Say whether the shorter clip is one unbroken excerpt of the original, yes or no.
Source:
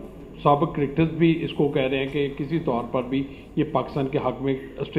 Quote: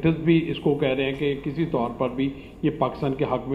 yes